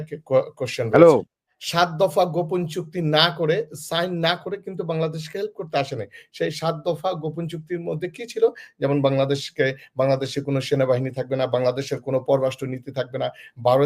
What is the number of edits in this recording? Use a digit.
1